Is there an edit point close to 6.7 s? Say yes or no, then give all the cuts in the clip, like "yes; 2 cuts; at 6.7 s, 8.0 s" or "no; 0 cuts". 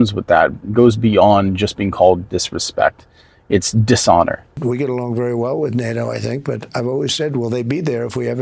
no; 1 cut; at 4.4 s